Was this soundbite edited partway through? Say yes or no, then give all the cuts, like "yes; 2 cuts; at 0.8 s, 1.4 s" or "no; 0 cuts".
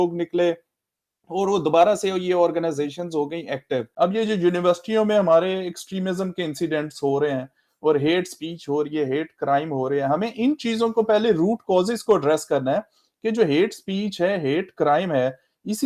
yes; 1 cut; at 3.9 s